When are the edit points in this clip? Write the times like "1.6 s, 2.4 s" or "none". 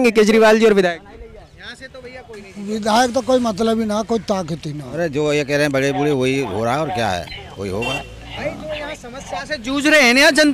4.8 s